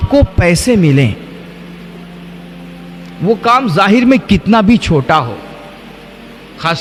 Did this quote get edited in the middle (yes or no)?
no